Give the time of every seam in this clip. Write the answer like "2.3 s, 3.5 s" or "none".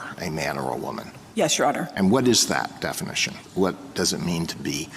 1.1 s, 3.4 s